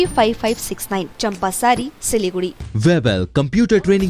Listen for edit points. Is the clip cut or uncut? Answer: cut